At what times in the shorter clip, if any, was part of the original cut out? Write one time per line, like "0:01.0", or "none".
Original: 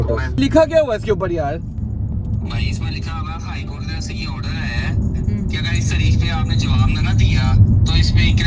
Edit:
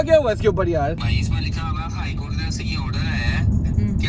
0:01.0